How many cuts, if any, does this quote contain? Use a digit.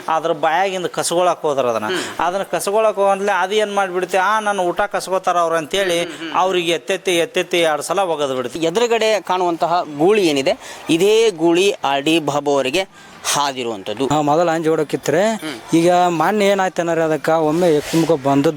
2